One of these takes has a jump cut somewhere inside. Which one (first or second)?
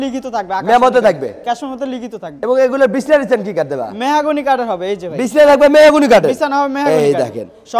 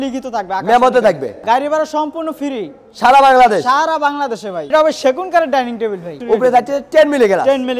second